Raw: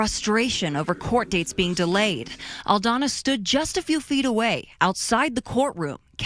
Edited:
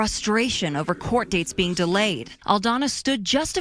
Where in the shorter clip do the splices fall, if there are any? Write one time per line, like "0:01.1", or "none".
0:02.3

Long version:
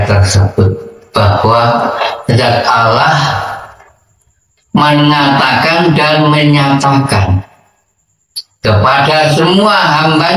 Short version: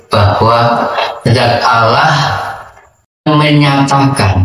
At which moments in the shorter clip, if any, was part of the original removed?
0:03.3

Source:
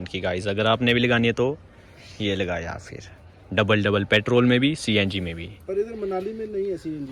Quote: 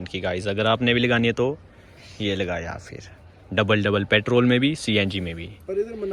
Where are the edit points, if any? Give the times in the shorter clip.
none

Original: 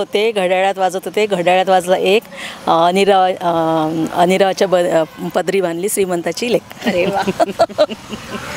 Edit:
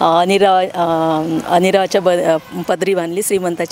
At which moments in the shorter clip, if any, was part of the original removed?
none

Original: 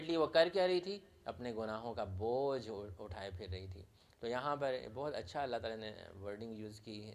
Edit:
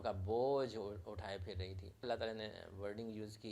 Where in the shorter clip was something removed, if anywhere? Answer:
0:02.1

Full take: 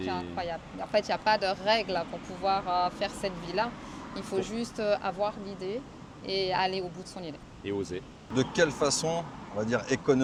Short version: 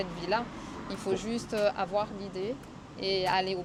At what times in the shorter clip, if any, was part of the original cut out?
none

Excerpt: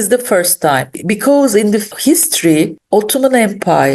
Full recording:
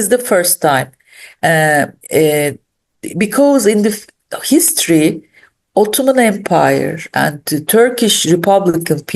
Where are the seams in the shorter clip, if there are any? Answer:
0:00.9
0:01.9
0:02.8

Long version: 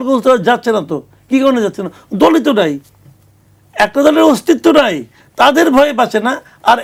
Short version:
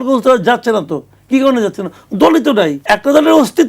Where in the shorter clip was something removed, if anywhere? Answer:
0:02.8

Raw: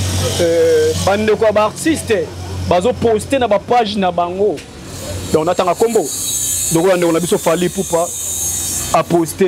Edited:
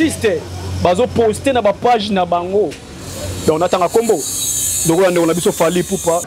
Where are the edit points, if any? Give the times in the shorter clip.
none

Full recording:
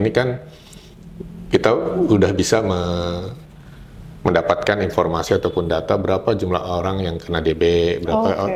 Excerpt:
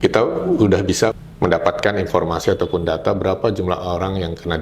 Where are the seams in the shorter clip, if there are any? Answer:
0:01.1

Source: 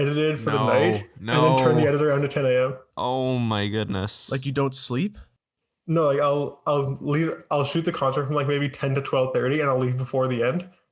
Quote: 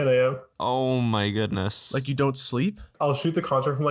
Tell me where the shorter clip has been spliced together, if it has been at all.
0:02.9

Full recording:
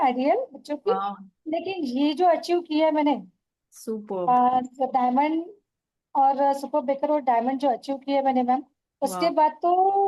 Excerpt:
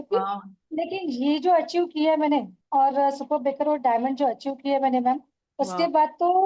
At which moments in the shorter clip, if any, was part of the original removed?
0:02.6

